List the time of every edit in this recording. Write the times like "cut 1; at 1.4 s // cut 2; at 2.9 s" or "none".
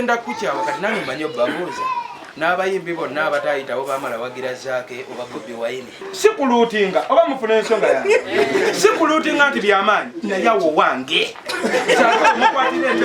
cut 1; at 6.1 s

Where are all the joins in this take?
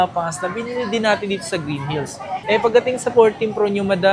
none

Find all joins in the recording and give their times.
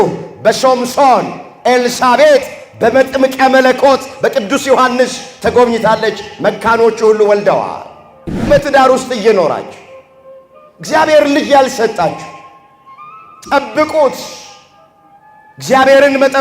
cut 1; at 8.4 s

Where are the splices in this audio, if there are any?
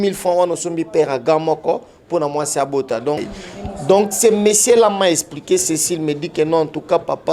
cut 1; at 3.2 s

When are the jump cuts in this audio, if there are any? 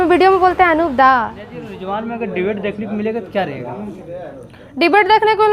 cut 1; at 1.7 s

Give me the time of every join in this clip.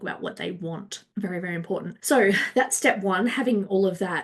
cut 1; at 1.0 s // cut 2; at 1.9 s

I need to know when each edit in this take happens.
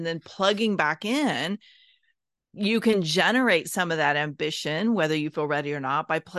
none

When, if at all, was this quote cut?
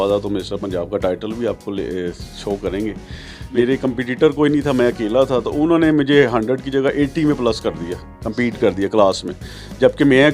cut 1; at 3.6 s

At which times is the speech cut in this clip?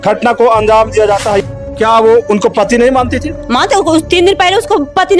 cut 1; at 1.4 s

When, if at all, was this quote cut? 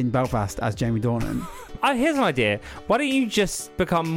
cut 1; at 1.7 s

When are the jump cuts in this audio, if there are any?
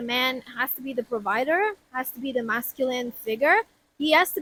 none

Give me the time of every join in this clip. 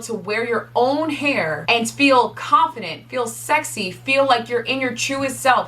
cut 1; at 1.6 s

